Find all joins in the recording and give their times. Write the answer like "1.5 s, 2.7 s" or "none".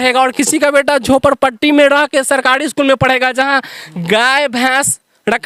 none